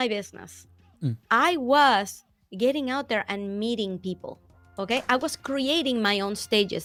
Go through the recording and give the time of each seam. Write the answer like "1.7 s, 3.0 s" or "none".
none